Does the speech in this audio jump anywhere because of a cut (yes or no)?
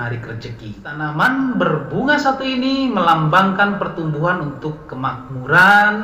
yes